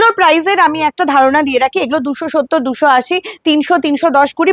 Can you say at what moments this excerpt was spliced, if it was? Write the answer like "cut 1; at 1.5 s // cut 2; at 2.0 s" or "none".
none